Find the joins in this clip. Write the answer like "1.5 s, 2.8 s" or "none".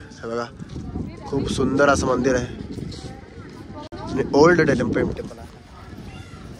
none

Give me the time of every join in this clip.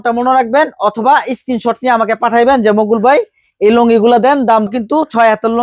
4.7 s

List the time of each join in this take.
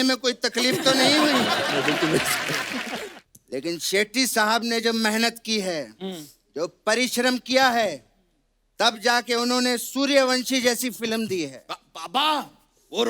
3.0 s

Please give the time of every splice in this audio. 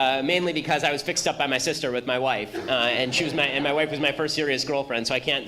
2.4 s

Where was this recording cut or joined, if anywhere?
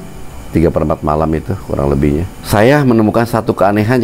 2.3 s

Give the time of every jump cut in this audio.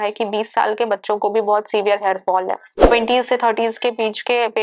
2.7 s

